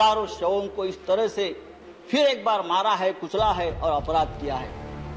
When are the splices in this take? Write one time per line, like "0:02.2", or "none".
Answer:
none